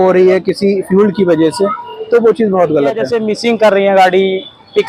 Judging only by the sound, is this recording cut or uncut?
cut